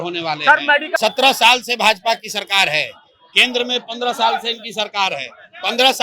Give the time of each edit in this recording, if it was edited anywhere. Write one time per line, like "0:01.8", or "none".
0:01.0